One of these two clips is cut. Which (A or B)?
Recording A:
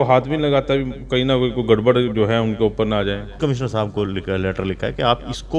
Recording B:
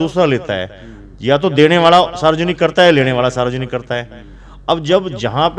A